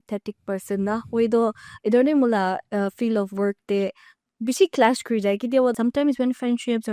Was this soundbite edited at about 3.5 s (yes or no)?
no